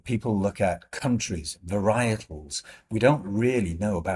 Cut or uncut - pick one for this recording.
uncut